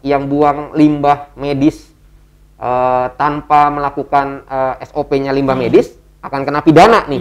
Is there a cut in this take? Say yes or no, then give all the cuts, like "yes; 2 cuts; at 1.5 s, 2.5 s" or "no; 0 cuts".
no; 0 cuts